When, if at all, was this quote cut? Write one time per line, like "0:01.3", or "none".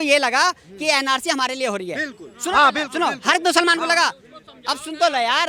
none